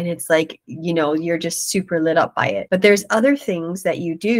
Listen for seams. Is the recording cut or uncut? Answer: uncut